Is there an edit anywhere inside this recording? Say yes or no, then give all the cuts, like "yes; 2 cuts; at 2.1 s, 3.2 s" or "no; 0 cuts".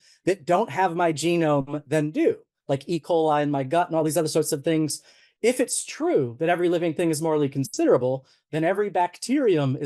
no; 0 cuts